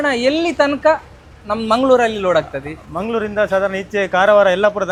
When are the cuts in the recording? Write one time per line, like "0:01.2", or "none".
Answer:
none